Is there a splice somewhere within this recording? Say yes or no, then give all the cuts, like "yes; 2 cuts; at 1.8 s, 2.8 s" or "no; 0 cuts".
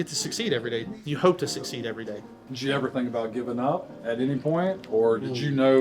yes; 1 cut; at 1.0 s